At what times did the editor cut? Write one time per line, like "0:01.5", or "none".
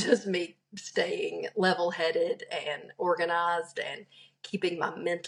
none